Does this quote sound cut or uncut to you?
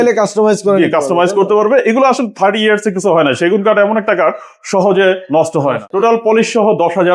cut